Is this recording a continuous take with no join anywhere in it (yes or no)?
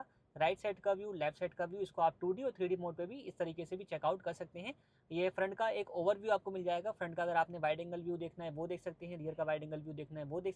yes